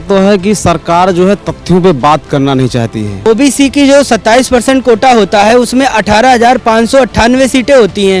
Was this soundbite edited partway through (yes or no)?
yes